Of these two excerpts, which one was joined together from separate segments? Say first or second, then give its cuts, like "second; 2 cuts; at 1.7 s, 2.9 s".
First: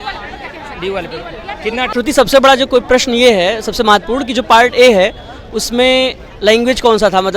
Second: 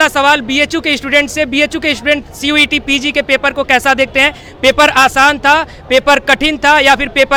first; 1 cut; at 1.9 s